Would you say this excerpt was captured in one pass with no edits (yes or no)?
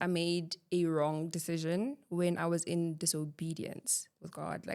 yes